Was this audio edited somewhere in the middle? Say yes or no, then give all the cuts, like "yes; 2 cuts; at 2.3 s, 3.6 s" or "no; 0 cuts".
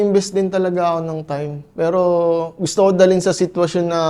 no; 0 cuts